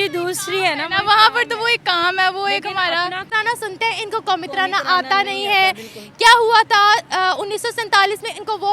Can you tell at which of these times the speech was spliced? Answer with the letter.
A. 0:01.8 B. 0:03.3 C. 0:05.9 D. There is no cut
B